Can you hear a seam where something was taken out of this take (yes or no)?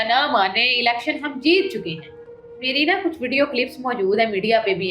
no